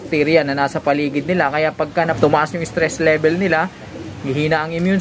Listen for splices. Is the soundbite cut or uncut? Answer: uncut